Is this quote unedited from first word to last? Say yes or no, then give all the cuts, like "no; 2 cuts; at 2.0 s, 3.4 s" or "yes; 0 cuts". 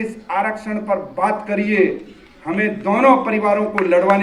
yes; 0 cuts